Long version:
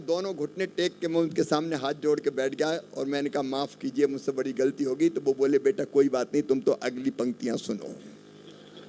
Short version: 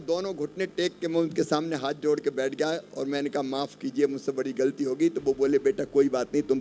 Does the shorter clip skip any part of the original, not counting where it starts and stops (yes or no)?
no